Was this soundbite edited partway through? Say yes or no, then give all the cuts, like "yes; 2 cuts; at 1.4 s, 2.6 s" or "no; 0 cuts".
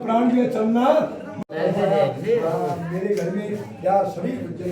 yes; 1 cut; at 1.3 s